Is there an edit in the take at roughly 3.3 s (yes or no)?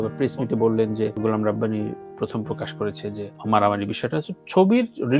yes